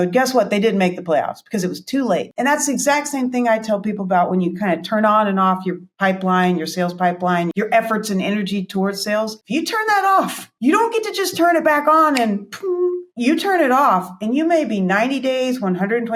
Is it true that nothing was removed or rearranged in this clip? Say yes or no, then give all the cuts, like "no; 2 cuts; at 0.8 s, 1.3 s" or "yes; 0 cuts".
yes; 0 cuts